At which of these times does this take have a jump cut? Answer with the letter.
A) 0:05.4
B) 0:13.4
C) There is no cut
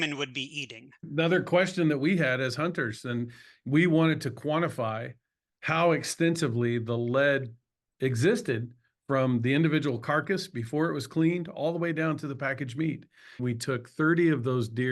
B